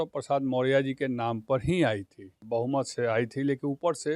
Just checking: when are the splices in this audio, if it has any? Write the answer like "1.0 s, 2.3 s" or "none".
2.3 s